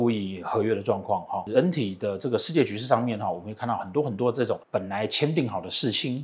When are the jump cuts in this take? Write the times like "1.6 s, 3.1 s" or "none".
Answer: 1.4 s, 4.6 s